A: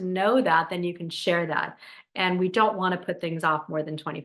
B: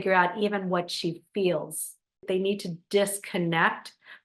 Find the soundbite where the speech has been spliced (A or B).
B